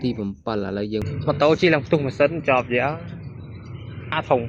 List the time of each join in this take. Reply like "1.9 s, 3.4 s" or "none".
1.0 s